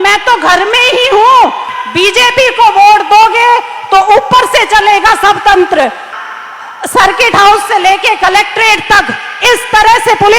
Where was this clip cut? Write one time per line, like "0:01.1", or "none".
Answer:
0:01.8
0:06.1

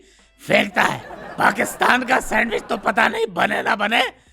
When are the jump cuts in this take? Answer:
0:01.3

